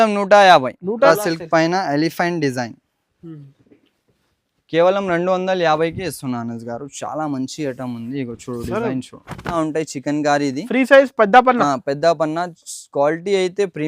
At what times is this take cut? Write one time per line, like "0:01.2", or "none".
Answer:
0:01.1
0:09.5